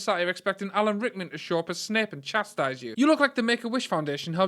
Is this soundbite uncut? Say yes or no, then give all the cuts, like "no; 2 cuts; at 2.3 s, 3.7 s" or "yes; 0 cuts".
no; 1 cut; at 2.9 s